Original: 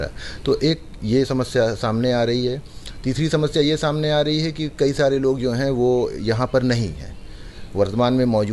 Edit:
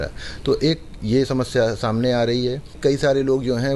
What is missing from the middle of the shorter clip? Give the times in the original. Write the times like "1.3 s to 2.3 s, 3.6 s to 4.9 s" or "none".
2.7 s to 4.6 s